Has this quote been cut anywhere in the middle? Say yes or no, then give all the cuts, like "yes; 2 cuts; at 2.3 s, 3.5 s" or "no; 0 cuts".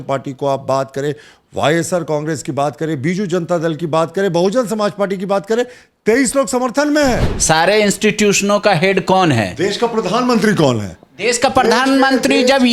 yes; 1 cut; at 7.3 s